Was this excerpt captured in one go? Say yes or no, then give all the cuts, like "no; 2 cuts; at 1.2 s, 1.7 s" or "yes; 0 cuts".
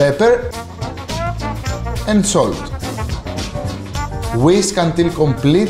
no; 1 cut; at 3.5 s